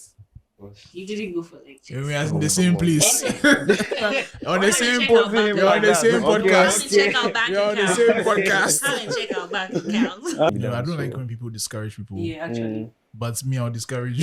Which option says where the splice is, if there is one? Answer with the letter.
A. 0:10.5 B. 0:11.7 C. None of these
A